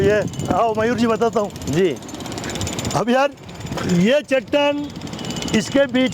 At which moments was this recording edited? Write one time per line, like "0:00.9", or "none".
none